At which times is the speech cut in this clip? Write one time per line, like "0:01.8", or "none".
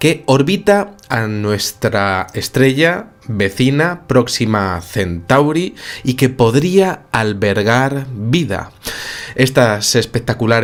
none